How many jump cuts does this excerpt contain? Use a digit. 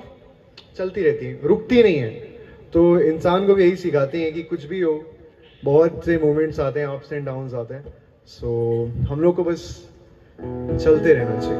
0